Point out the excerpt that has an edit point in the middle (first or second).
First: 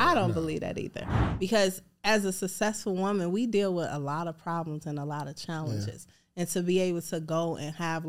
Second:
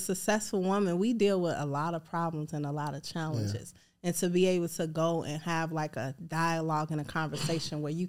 first